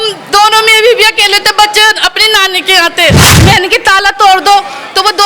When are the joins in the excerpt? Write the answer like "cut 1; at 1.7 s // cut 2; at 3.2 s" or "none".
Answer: cut 1; at 3.3 s